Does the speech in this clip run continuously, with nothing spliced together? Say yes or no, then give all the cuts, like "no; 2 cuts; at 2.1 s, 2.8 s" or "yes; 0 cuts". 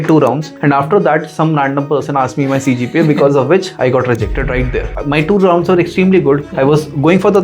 no; 1 cut; at 4.9 s